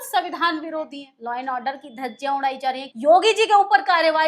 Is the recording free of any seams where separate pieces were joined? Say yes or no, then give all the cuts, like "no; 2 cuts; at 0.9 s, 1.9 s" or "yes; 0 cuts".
no; 2 cuts; at 1.1 s, 2.9 s